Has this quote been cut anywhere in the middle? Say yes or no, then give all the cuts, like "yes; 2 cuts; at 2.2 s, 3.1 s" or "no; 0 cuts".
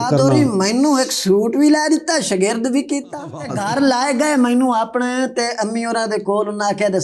yes; 1 cut; at 3.5 s